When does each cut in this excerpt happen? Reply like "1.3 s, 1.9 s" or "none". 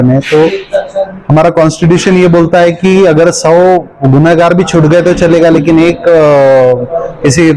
none

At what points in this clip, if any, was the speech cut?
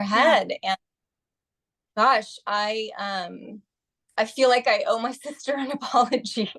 none

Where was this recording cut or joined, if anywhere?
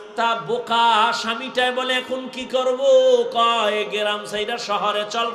none

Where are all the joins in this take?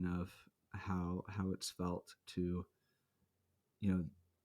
none

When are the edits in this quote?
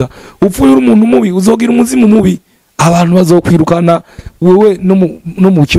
none

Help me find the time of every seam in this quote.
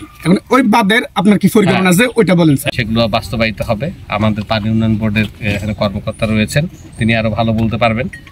2.7 s

